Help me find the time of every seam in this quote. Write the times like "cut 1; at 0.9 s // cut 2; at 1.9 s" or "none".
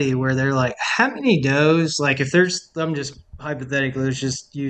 none